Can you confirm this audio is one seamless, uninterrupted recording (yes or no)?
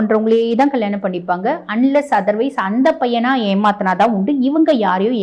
yes